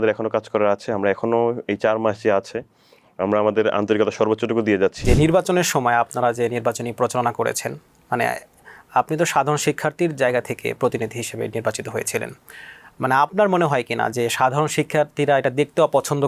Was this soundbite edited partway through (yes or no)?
yes